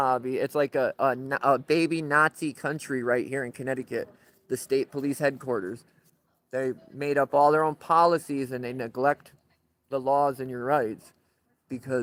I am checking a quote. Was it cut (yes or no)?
no